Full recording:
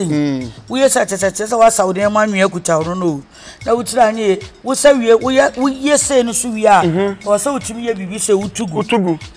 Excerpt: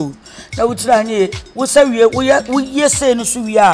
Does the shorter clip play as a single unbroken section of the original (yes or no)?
yes